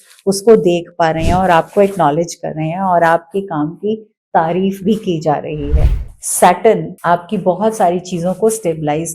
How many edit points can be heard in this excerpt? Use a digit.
2